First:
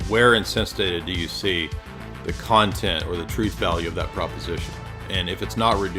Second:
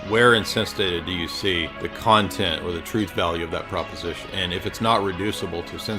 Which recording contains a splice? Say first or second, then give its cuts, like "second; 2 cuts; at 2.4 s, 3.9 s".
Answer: second; 2 cuts; at 1.8 s, 4.3 s